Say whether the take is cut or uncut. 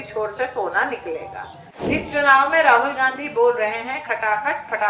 cut